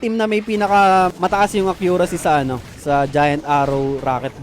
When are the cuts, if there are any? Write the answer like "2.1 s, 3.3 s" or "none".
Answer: 1.1 s

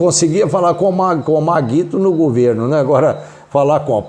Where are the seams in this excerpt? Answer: none

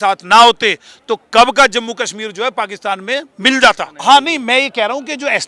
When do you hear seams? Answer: 3.9 s

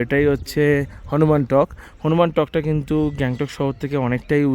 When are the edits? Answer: none

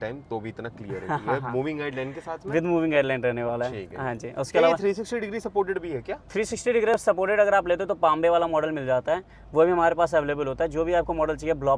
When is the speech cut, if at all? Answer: none

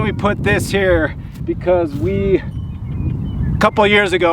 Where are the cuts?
1.3 s

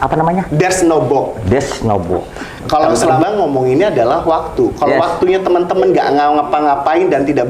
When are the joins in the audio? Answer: 3.2 s

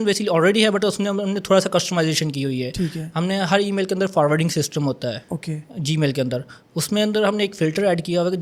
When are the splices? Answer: none

